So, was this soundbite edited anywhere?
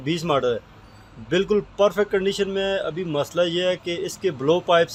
no; 0 cuts

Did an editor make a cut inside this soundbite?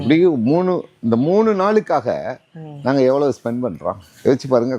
no; 0 cuts

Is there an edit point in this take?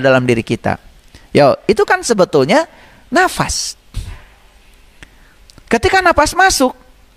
no; 0 cuts

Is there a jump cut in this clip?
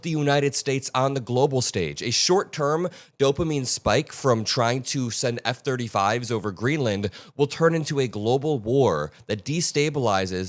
no; 0 cuts

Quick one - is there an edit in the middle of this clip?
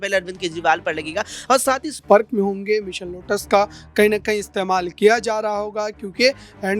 yes; 1 cut; at 1.9 s

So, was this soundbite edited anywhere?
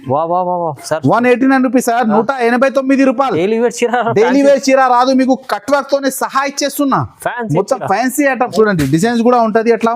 yes; 1 cut; at 8.5 s

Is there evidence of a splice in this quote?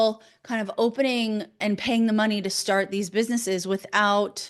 yes; 1 cut; at 1.6 s

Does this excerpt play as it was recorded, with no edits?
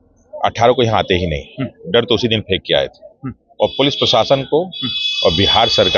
yes; 0 cuts

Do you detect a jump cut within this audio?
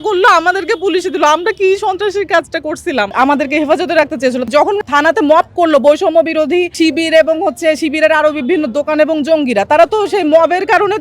yes; 2 cuts; at 3.1 s, 6.7 s

